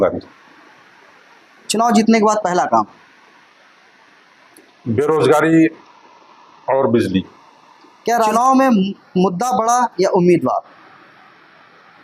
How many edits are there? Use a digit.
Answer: 0